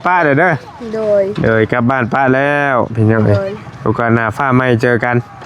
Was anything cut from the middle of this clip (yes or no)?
no